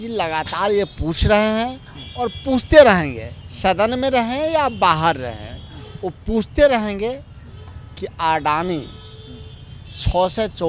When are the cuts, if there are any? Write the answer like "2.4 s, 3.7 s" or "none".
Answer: none